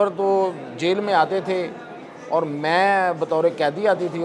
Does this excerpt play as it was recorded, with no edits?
yes; 0 cuts

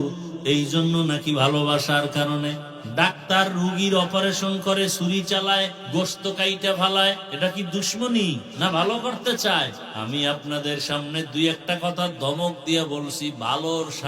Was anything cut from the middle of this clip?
yes; 5 cuts; at 2.7 s, 5.8 s, 7.3 s, 8.5 s, 9.9 s

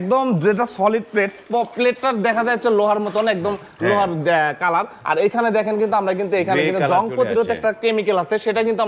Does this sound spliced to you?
no; 0 cuts

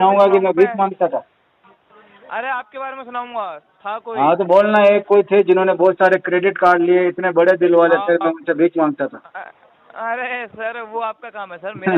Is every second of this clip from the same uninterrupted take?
yes; 0 cuts

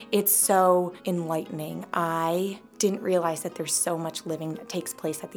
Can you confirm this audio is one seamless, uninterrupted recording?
no; 2 cuts; at 1.0 s, 2.6 s

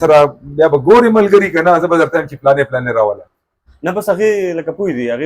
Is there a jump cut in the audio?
yes; 1 cut; at 3.3 s

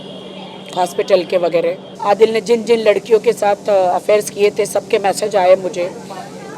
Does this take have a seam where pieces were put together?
yes; 1 cut; at 1.9 s

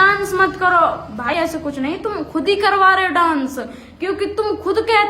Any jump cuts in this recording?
yes; 1 cut; at 1.3 s

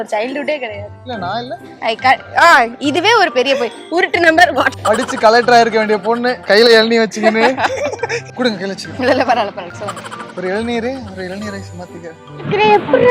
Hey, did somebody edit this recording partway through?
yes; 2 cuts; at 4.8 s, 9.7 s

